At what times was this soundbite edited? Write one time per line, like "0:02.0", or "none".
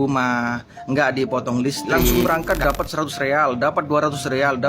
0:02.2